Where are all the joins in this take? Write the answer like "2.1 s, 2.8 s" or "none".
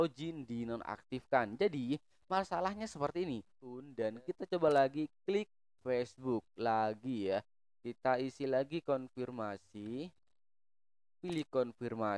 3.9 s